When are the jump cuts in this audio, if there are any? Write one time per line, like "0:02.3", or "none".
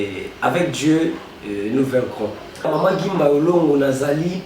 0:02.7